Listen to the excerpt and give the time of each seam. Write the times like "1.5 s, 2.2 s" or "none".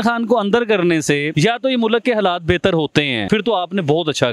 1.3 s, 3.3 s